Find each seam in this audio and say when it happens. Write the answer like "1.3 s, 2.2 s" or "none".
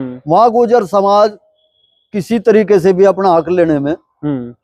none